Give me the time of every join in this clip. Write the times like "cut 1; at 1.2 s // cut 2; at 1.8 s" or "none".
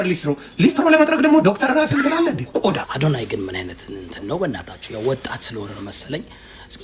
cut 1; at 2.9 s